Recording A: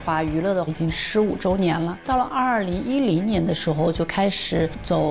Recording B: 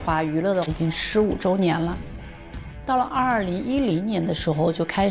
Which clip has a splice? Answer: A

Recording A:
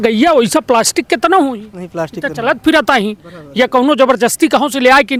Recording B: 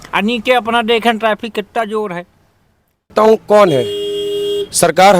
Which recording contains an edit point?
B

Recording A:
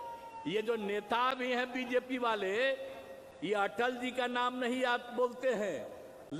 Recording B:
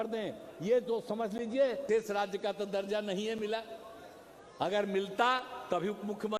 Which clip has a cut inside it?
B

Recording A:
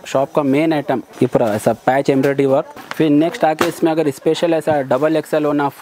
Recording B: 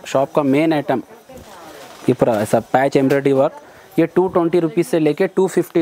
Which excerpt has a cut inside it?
A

